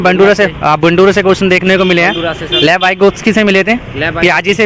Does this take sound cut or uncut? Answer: uncut